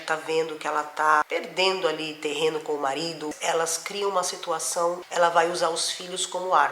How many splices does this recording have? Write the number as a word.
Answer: three